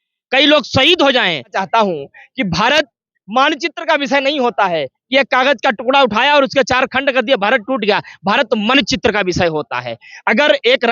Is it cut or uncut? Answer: cut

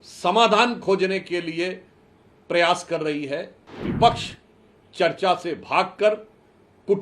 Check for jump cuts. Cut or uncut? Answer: cut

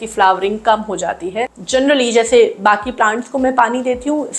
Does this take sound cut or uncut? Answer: cut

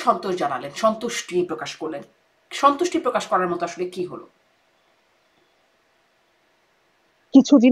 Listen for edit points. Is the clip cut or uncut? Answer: uncut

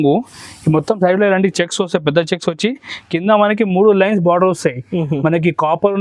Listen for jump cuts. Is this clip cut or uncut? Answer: uncut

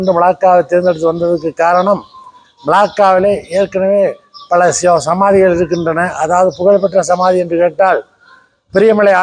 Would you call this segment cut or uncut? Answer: uncut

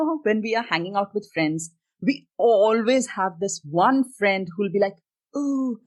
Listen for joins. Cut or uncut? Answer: uncut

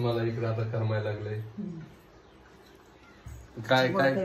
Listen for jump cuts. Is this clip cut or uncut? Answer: uncut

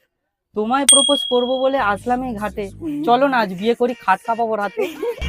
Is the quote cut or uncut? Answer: uncut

